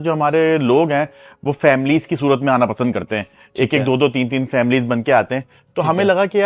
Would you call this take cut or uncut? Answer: uncut